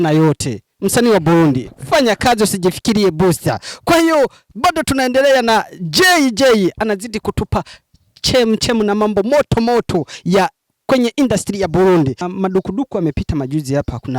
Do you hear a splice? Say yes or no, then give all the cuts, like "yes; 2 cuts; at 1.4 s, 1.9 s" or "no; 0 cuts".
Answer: yes; 1 cut; at 12.3 s